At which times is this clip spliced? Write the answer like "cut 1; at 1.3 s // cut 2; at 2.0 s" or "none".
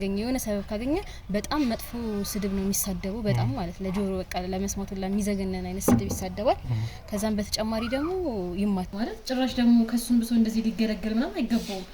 cut 1; at 8.9 s